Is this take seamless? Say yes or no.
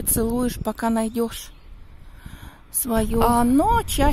no